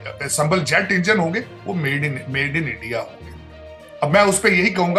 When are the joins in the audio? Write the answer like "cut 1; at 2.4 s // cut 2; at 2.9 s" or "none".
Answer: none